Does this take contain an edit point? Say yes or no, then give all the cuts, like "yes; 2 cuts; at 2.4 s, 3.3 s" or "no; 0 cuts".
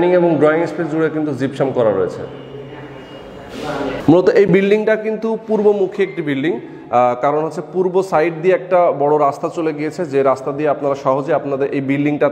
no; 0 cuts